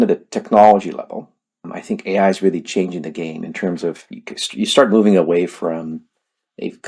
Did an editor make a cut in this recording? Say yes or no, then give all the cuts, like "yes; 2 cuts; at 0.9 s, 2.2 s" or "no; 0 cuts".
yes; 1 cut; at 1.7 s